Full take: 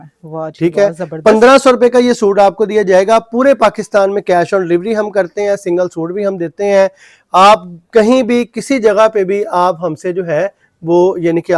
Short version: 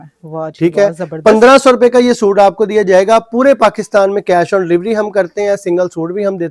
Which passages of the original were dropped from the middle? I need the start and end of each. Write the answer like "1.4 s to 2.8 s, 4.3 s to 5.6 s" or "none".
none